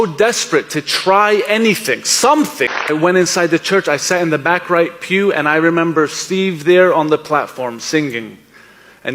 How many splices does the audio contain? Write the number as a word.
one